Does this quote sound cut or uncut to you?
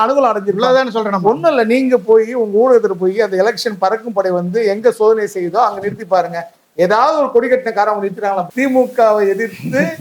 cut